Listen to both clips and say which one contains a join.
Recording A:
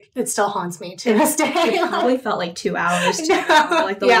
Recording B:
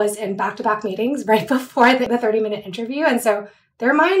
B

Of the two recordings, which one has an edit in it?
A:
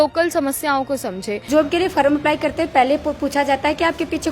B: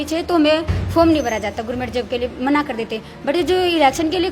A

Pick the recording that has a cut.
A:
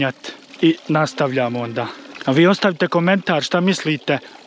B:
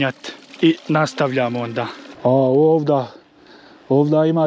B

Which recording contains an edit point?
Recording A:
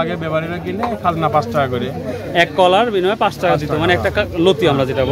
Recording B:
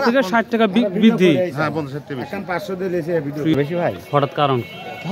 B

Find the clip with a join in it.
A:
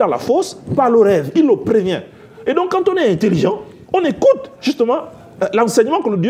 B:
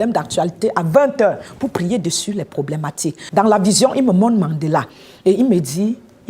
B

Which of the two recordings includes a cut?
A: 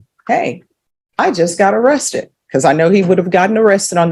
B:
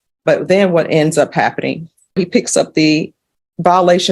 B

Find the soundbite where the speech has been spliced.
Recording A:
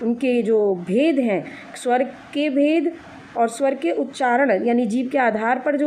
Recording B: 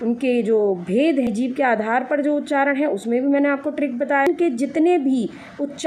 B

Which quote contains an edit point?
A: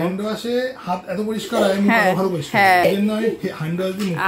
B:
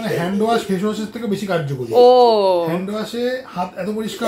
A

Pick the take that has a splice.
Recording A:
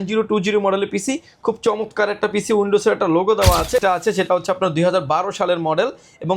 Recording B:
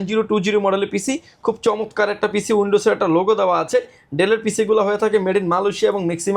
A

